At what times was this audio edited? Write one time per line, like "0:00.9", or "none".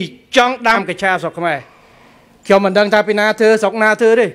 none